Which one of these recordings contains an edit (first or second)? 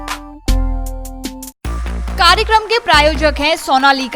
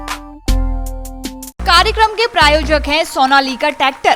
second